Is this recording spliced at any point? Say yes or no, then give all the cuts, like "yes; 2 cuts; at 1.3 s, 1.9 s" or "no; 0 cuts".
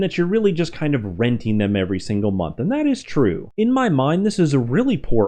yes; 1 cut; at 3.4 s